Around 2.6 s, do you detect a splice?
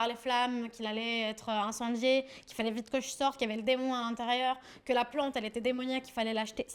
no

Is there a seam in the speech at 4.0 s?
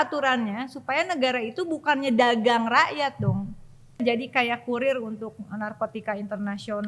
yes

